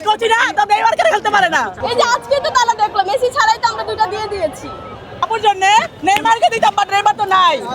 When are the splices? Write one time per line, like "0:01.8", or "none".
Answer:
0:01.8
0:05.1